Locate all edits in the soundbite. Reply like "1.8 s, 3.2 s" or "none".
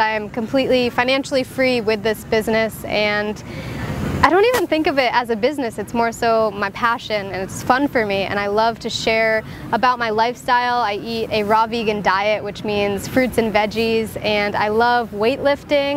9.7 s